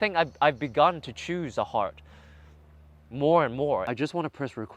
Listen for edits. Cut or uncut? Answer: cut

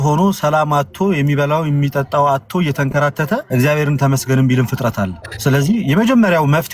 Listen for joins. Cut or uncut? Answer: cut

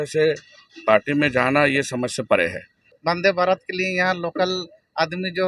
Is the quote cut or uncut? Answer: cut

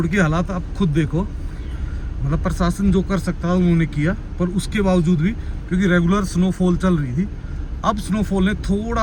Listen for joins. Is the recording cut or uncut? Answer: uncut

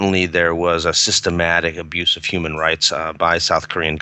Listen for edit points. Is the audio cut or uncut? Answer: uncut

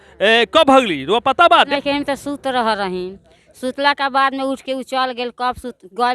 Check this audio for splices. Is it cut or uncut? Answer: cut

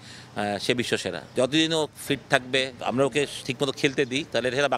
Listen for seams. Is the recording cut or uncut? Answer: cut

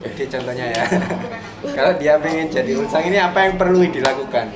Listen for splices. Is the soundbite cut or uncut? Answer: uncut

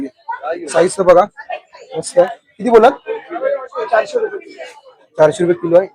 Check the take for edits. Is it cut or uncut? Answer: uncut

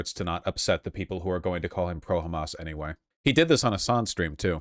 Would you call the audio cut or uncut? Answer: cut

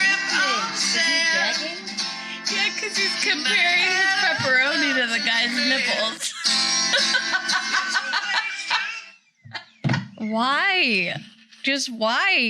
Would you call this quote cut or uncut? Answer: uncut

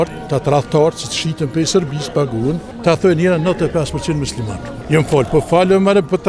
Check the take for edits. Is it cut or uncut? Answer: cut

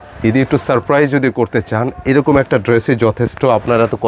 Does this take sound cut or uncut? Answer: uncut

